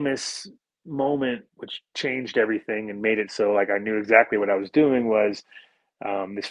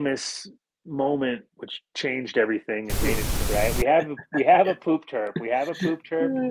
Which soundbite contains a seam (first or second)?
second